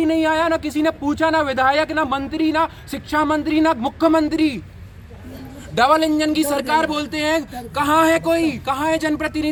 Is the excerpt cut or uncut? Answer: uncut